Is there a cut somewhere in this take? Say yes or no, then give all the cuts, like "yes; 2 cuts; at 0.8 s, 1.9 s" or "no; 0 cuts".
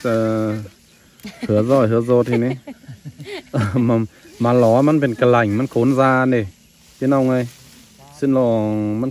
no; 0 cuts